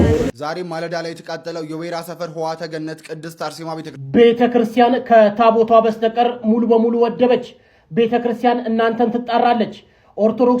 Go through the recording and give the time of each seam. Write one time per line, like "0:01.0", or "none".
0:04.0